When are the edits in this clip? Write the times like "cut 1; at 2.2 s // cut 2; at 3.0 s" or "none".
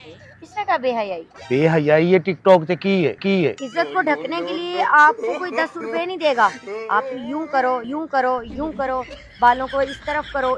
cut 1; at 3.6 s